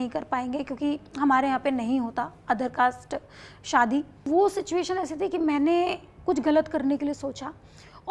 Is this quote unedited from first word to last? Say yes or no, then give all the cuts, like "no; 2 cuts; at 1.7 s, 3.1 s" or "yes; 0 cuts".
no; 1 cut; at 4.2 s